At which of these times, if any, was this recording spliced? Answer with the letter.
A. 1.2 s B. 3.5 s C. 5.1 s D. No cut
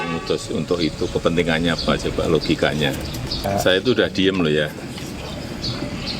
B